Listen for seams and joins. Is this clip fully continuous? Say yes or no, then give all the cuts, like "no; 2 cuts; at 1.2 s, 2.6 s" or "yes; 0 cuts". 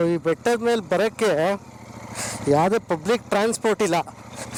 yes; 0 cuts